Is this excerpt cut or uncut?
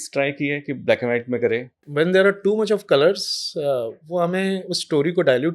cut